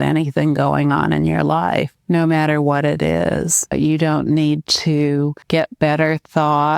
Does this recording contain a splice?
yes; 3 cuts; at 2.0 s, 3.7 s, 5.4 s

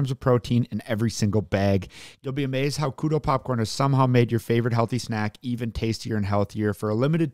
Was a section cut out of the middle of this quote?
yes; 1 cut; at 2.1 s

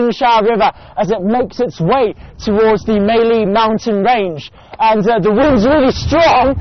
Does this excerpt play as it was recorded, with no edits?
yes; 0 cuts

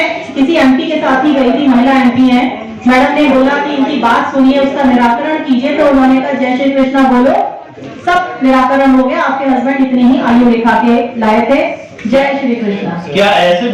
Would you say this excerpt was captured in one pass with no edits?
yes; 0 cuts

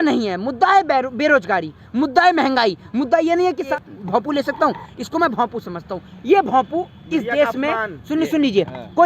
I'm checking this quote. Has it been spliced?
yes; 1 cut; at 3.7 s

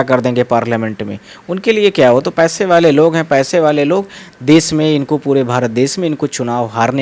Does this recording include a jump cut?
yes; 1 cut; at 4.2 s

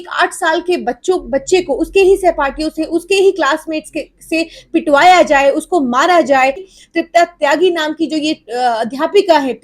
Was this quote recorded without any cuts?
no; 1 cut; at 6.7 s

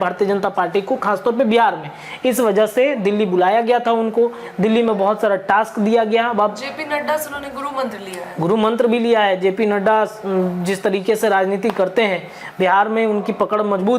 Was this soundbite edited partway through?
no; 0 cuts

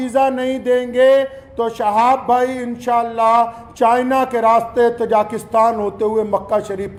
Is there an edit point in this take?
no; 0 cuts

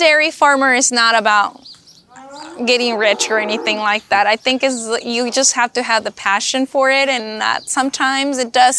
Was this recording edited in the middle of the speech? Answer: no; 0 cuts

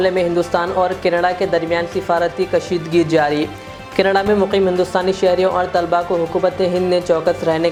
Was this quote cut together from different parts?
no; 0 cuts

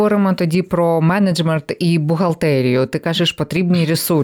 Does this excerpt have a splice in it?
no; 0 cuts

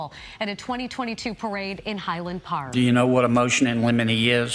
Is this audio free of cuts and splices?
no; 1 cut; at 2.7 s

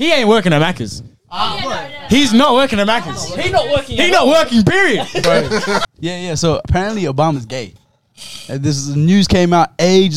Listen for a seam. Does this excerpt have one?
yes; 1 cut; at 5.9 s

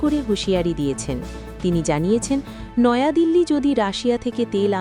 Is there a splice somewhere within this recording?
no; 0 cuts

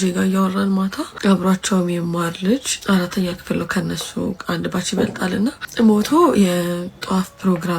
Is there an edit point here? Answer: yes; 3 cuts; at 1.1 s, 2.7 s, 5.6 s

